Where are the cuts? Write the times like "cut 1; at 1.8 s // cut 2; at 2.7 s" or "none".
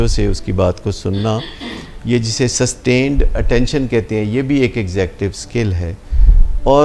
none